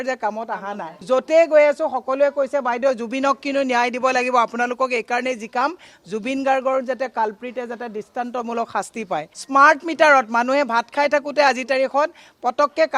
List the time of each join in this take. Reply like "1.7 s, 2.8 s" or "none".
0.9 s, 9.4 s